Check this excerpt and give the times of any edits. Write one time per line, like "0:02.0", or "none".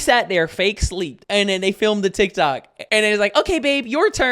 0:01.2
0:02.7